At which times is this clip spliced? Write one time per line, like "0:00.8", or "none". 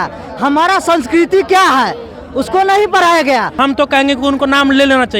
0:03.6